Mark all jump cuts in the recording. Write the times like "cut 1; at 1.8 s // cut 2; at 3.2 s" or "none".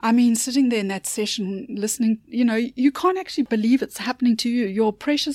cut 1; at 3.5 s

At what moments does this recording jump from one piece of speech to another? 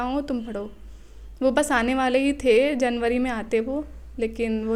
none

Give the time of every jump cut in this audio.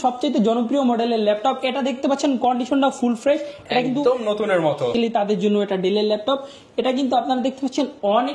cut 1; at 4.9 s

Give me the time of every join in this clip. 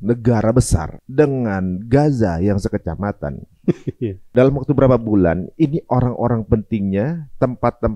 cut 1; at 1.0 s // cut 2; at 4.3 s

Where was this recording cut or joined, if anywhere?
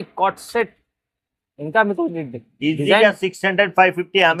none

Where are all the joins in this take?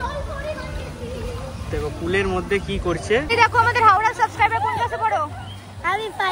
cut 1; at 3.3 s

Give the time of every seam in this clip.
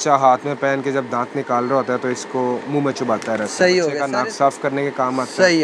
cut 1; at 4.0 s

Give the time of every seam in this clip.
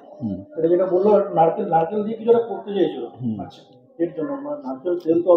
none

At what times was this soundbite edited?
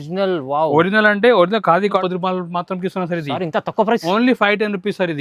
cut 1; at 2.0 s

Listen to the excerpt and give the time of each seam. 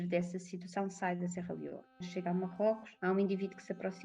cut 1; at 2.1 s // cut 2; at 2.9 s

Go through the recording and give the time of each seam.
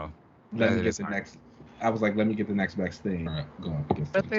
cut 1; at 3.3 s

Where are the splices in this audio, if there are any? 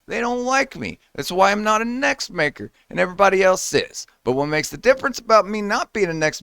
none

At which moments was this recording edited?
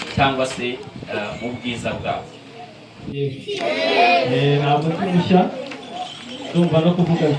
cut 1; at 3.1 s

